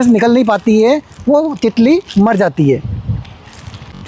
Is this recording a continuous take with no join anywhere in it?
yes; 0 cuts

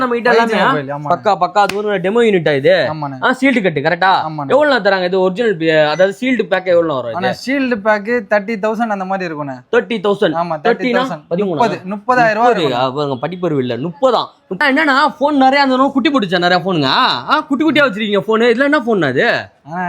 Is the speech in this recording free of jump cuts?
no; 1 cut; at 14.6 s

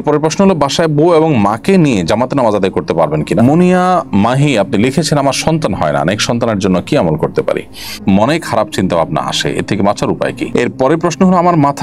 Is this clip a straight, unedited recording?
no; 3 cuts; at 3.4 s, 7.9 s, 10.4 s

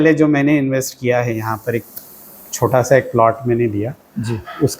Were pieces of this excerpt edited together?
no; 0 cuts

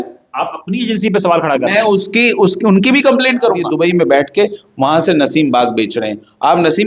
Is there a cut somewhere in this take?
yes; 1 cut; at 3.7 s

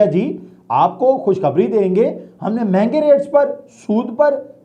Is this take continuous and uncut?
yes; 0 cuts

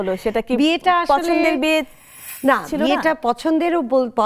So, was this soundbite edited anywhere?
no; 0 cuts

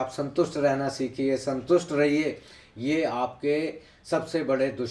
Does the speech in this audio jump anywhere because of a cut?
no; 0 cuts

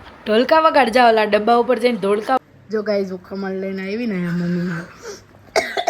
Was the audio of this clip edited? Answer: yes; 1 cut; at 2.4 s

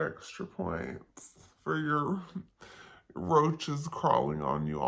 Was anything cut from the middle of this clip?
no; 0 cuts

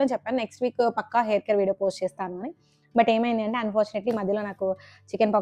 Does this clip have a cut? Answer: no; 0 cuts

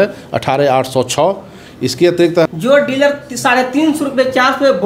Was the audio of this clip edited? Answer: yes; 1 cut; at 2.5 s

